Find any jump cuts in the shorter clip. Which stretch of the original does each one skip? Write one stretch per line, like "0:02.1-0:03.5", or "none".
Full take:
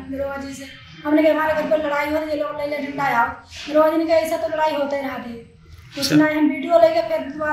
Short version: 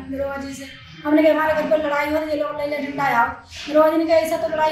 none